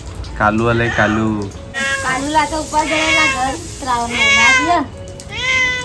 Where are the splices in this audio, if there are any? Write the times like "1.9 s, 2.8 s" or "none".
1.9 s